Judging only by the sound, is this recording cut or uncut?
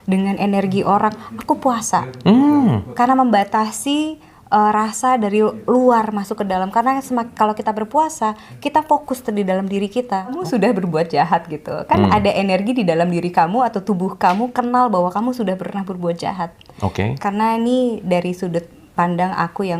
cut